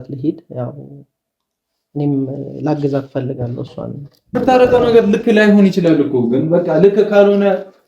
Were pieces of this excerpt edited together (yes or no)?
yes